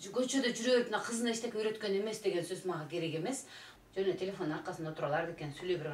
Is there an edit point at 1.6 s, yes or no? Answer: no